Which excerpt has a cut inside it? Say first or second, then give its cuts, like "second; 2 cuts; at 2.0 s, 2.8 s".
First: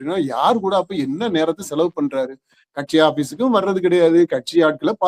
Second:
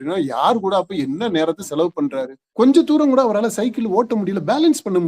second; 1 cut; at 2.4 s